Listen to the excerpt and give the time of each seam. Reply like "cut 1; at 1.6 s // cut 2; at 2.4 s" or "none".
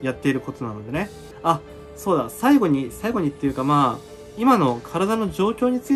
cut 1; at 1.2 s